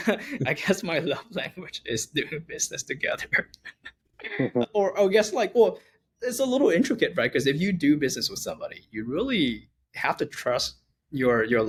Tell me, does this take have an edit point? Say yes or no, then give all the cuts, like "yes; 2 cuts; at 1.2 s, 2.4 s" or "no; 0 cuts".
no; 0 cuts